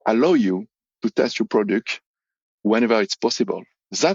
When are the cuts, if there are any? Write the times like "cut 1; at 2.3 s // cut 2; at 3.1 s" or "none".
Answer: cut 1; at 2.6 s